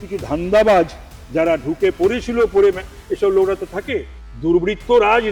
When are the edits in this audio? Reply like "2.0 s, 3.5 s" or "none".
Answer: 4.1 s